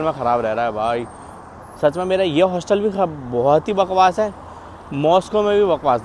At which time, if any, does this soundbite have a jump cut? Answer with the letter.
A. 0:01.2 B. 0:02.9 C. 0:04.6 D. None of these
D